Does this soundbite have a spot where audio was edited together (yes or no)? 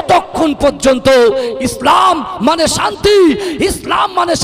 no